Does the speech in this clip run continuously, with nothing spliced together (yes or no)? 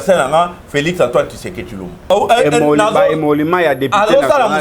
no